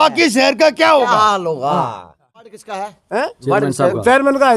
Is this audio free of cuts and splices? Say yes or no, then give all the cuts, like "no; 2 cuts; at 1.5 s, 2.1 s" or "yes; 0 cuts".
no; 1 cut; at 2.5 s